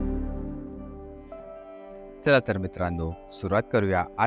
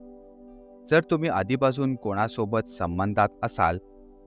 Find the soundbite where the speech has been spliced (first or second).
first